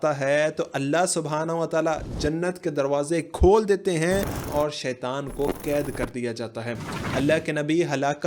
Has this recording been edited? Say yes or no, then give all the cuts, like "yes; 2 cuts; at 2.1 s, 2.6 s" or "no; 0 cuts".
yes; 2 cuts; at 4.5 s, 7.0 s